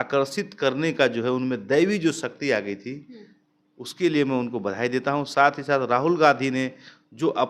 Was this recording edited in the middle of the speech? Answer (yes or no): no